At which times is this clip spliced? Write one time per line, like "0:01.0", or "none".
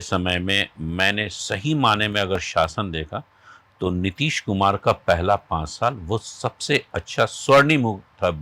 none